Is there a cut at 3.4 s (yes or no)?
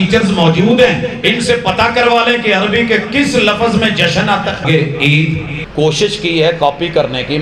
no